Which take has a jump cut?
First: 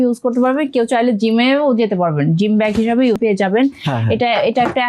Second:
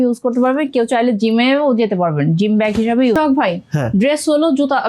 first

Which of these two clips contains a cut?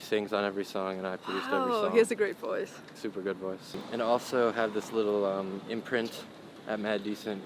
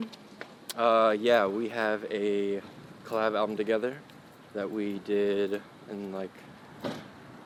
first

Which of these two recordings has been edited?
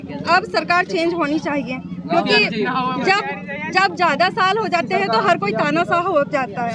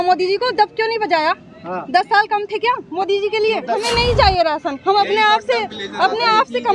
second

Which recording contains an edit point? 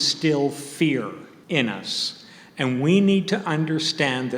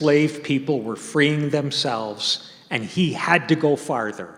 first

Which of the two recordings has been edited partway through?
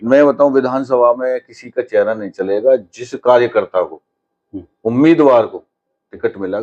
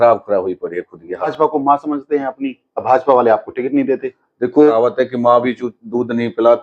second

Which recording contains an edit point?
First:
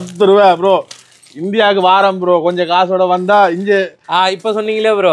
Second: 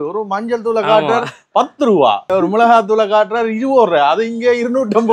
second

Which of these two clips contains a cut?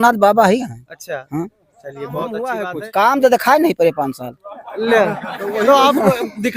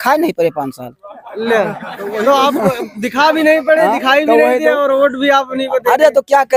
first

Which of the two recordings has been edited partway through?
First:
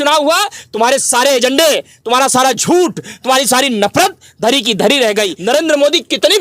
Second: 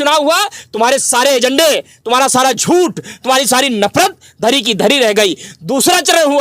first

